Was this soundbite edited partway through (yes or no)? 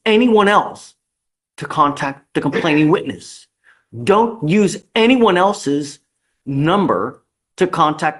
no